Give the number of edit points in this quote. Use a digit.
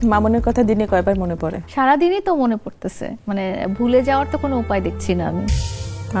1